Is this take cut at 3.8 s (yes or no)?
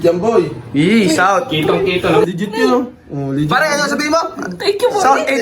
no